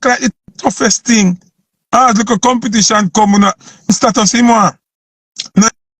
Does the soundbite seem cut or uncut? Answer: cut